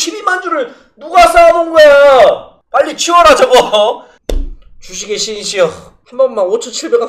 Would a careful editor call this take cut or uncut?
cut